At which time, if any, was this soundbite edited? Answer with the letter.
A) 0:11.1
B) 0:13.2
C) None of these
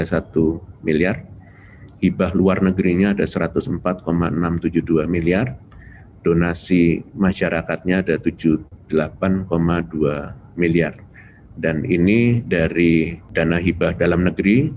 B